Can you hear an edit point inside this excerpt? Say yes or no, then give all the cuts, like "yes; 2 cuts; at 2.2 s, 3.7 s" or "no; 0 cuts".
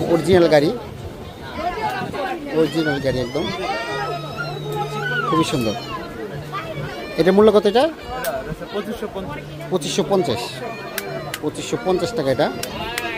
no; 0 cuts